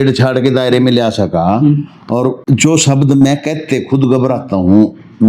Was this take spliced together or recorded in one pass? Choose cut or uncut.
cut